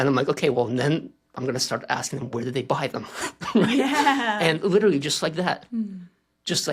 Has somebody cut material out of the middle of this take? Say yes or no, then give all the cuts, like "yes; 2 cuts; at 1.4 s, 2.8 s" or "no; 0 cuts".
no; 0 cuts